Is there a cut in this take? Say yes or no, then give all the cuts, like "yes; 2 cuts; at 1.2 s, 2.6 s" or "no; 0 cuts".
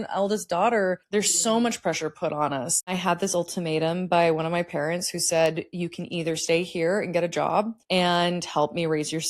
yes; 3 cuts; at 1.0 s, 2.9 s, 7.8 s